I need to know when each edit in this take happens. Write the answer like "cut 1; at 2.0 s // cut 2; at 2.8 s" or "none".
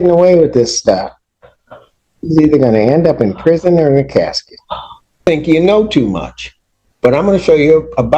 cut 1; at 5.3 s